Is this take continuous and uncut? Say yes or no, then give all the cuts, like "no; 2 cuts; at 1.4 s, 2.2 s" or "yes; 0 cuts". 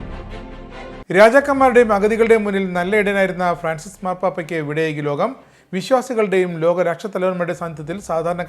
no; 1 cut; at 1.0 s